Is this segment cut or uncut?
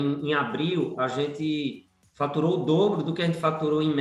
uncut